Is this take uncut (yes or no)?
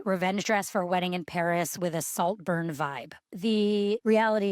no